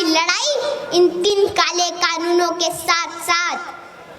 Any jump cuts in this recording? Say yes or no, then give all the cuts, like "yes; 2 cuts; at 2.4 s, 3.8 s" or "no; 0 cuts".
yes; 1 cut; at 1.3 s